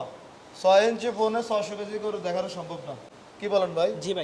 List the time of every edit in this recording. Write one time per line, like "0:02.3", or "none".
none